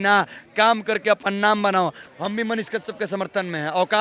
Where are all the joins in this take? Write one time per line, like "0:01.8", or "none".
0:02.1